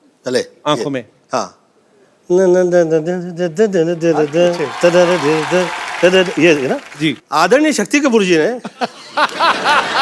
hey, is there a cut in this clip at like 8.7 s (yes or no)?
no